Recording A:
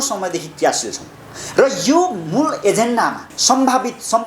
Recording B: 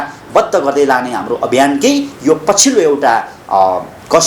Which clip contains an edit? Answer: A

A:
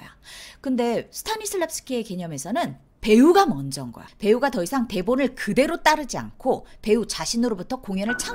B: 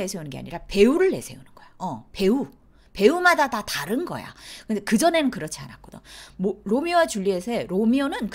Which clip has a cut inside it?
A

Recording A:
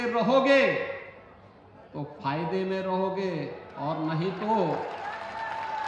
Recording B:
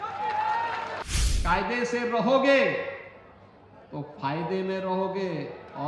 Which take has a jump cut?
B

